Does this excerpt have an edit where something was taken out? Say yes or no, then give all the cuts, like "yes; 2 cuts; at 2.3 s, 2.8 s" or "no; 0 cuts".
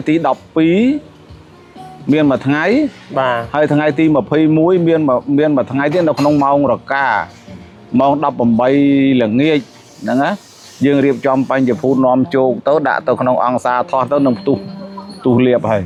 no; 0 cuts